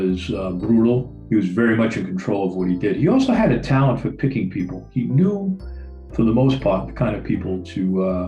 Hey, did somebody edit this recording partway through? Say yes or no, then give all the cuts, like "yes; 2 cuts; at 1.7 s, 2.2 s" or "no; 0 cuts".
no; 0 cuts